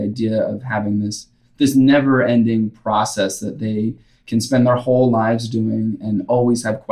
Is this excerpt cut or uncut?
uncut